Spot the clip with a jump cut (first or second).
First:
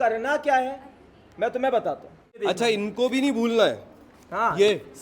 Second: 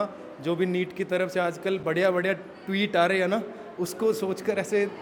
first